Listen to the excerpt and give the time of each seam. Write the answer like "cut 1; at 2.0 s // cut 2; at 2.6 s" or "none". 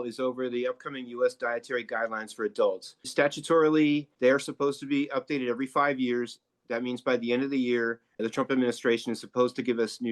cut 1; at 3.1 s // cut 2; at 4.1 s // cut 3; at 8.0 s